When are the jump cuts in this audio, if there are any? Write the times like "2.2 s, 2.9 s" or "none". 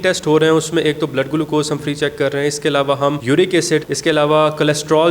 3.2 s, 3.9 s

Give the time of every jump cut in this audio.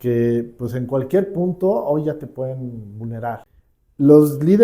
3.5 s

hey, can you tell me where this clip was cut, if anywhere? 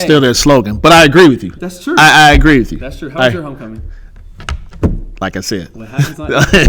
none

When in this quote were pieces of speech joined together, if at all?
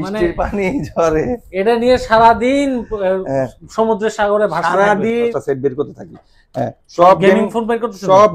5.3 s

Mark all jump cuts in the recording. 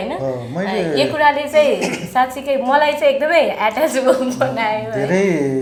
none

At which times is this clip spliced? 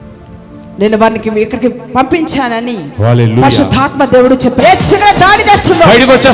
4.6 s

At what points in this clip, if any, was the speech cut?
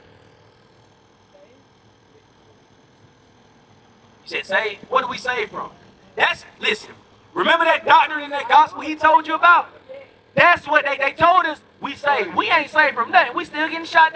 none

